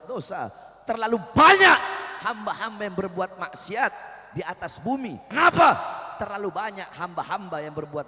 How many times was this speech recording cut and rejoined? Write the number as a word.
one